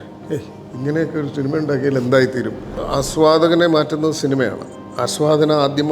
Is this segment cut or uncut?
cut